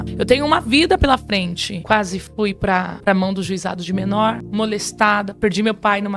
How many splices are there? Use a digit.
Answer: 2